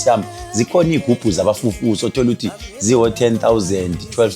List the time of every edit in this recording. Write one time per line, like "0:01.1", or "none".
0:01.0